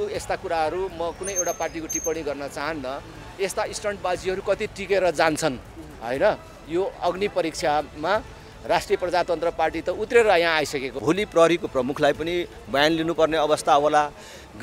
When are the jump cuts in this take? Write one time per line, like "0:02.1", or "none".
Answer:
0:10.9